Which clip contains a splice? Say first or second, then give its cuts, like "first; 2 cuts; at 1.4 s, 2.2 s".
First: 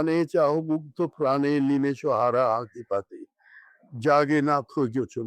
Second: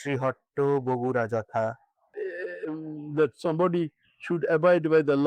second; 1 cut; at 2.2 s